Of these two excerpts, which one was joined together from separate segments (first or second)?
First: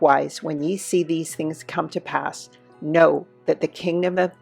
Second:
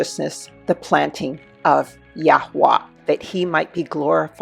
second